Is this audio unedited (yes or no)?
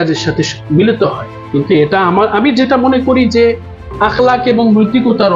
yes